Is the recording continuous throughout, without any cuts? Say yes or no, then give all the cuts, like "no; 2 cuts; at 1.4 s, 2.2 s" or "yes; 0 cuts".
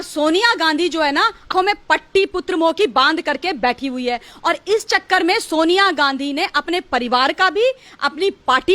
no; 1 cut; at 1.5 s